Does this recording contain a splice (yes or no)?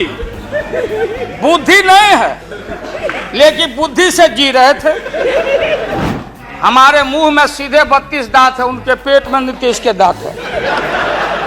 yes